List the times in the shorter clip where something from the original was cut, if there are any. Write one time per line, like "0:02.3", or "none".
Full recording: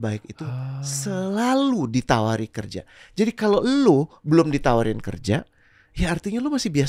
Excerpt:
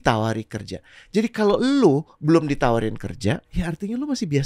0:03.5